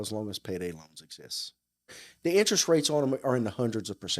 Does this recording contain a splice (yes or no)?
yes